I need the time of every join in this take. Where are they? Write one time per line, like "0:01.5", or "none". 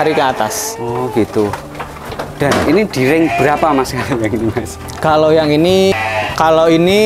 0:05.9